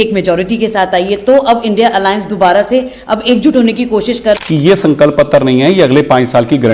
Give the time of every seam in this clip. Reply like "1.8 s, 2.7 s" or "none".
4.4 s